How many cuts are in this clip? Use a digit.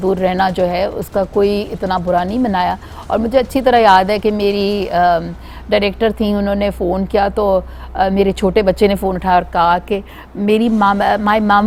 0